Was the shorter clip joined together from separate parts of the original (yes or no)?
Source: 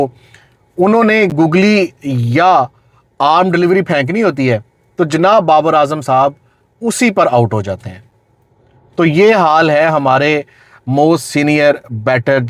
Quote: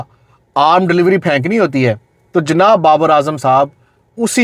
no